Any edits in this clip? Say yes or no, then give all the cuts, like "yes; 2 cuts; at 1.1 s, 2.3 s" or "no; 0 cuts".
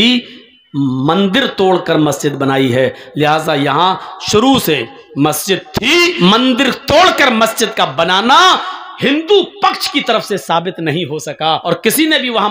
yes; 2 cuts; at 6.2 s, 11.6 s